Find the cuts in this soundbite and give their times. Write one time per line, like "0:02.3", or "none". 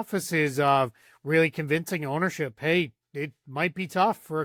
none